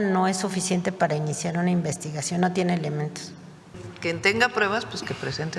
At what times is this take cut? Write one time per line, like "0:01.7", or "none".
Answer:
0:03.9